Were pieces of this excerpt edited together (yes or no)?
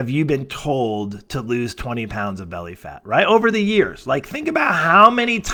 no